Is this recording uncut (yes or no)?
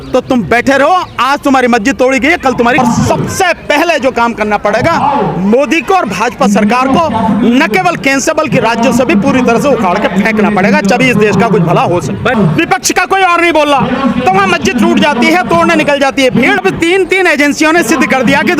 no